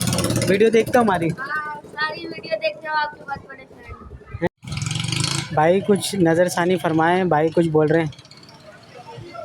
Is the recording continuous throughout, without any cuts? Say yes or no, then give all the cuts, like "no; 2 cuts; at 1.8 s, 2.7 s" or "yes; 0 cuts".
no; 1 cut; at 4.5 s